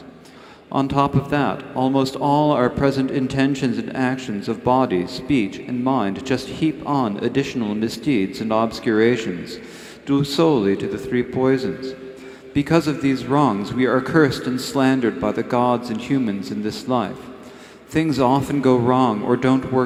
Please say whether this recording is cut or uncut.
uncut